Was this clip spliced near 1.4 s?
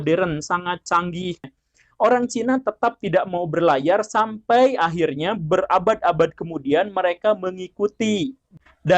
yes; 1 cut; at 1.4 s

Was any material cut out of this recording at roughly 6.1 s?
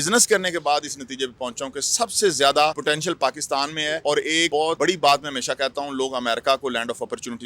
no; 2 cuts; at 2.8 s, 4.3 s

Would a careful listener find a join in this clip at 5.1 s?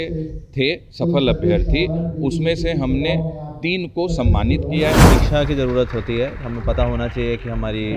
yes; 1 cut; at 5.1 s

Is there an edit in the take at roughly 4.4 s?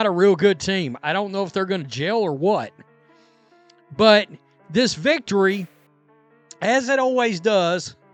no; 0 cuts

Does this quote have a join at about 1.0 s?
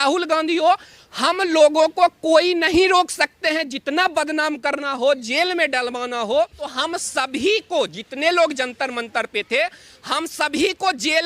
no; 1 cut; at 6.6 s

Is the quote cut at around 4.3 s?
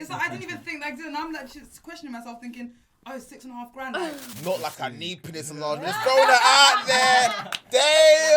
yes; 1 cut; at 4.3 s

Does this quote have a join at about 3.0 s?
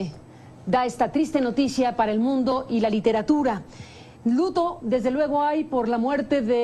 yes; 1 cut; at 3.0 s

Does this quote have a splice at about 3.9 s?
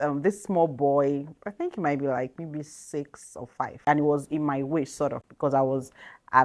yes; 1 cut; at 3.9 s

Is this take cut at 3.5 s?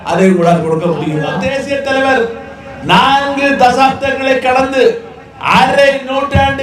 no; 1 cut; at 1.4 s

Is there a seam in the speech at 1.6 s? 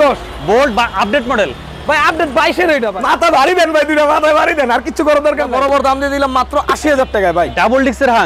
no; 2 cuts; at 2.9 s, 5.5 s

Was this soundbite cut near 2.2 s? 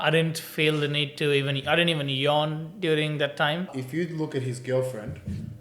no; 1 cut; at 3.7 s

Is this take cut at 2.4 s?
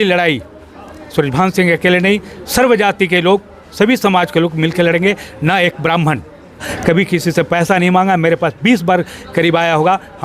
no; 1 cut; at 6.6 s

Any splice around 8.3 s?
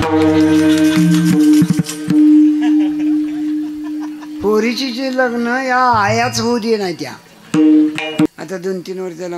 yes; 1 cut; at 8.3 s

